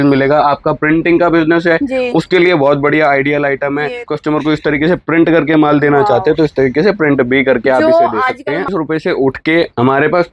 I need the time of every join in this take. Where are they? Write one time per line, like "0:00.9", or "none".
0:04.1
0:08.7